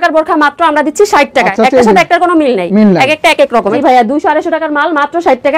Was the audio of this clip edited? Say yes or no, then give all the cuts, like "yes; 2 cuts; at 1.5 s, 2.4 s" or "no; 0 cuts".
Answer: yes; 2 cuts; at 1.5 s, 3.8 s